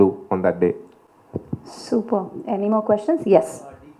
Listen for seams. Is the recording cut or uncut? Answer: uncut